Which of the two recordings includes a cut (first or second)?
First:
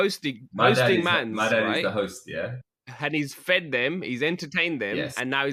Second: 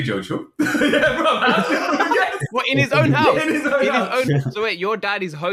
second